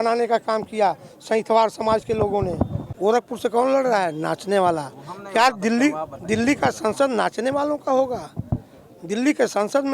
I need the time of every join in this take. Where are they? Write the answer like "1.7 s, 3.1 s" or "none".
2.8 s